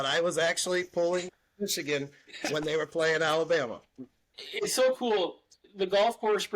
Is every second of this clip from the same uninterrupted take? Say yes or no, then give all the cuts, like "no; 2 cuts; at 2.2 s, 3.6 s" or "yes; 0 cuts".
no; 1 cut; at 4.3 s